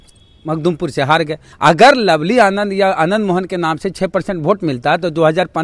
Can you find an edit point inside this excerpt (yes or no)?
yes